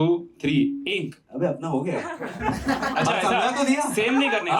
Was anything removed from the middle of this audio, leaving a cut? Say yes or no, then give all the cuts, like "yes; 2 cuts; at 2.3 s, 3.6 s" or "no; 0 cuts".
no; 0 cuts